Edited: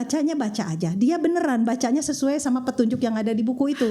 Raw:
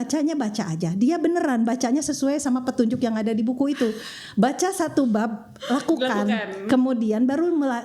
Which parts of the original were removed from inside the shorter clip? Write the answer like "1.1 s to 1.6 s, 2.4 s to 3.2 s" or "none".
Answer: none